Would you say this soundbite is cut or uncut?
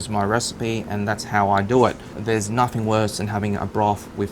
cut